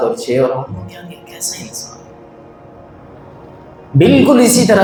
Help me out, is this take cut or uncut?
uncut